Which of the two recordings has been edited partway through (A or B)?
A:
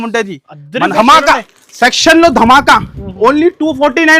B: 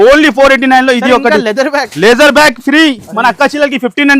A